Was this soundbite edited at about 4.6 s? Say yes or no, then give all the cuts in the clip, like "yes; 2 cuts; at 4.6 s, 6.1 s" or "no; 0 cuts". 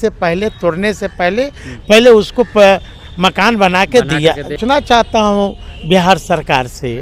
yes; 1 cut; at 4.6 s